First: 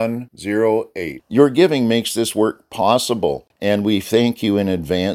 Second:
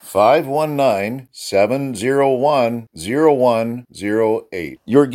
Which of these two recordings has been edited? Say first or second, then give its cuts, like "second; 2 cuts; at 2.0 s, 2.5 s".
first; 1 cut; at 3.5 s